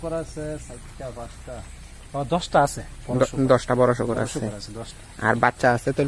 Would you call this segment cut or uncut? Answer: uncut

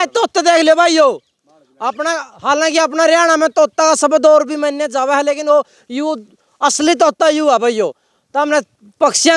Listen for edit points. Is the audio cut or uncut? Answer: uncut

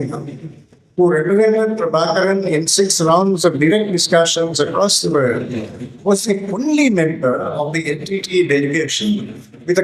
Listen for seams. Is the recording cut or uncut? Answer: uncut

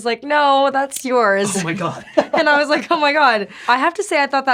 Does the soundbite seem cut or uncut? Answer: cut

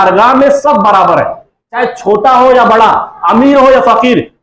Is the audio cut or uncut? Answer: uncut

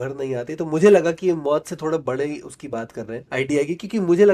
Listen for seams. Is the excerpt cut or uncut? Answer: cut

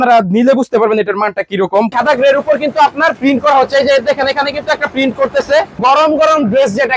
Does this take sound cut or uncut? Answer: cut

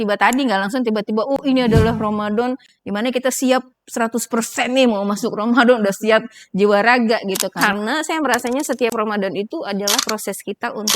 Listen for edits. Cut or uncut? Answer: cut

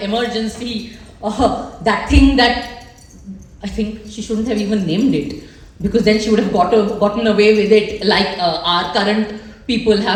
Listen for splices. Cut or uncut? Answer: uncut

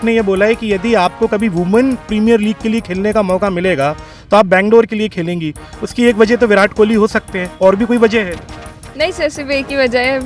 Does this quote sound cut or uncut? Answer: uncut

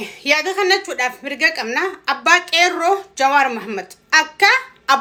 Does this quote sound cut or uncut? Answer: uncut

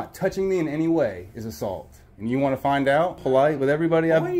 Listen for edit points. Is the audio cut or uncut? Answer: cut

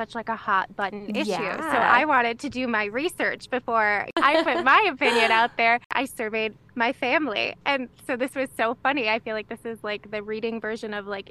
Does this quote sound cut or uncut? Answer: cut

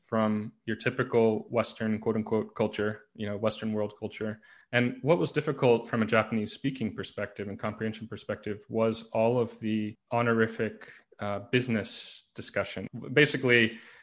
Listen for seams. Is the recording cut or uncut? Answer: cut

